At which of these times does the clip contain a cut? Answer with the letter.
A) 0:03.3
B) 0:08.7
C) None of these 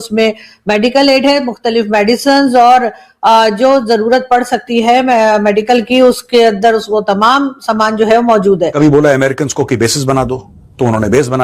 B